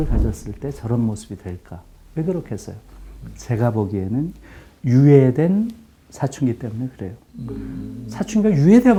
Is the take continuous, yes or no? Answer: yes